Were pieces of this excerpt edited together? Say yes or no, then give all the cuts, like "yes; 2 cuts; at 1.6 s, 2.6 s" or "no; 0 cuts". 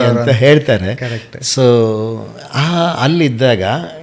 no; 0 cuts